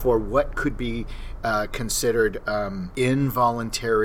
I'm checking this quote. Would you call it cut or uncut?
cut